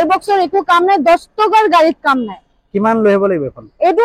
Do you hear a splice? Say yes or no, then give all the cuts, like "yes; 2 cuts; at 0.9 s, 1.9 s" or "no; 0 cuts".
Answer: no; 0 cuts